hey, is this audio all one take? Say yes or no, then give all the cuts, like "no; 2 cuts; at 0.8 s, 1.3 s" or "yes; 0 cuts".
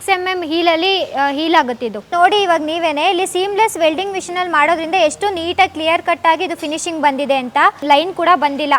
no; 2 cuts; at 2.1 s, 7.8 s